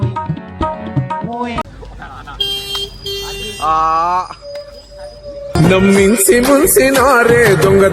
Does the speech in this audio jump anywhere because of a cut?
yes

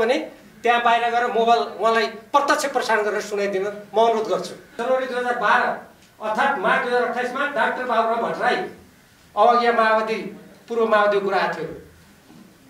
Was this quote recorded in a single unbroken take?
no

